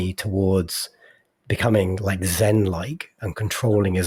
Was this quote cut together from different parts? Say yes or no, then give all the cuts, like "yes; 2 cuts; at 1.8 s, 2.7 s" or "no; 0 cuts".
no; 0 cuts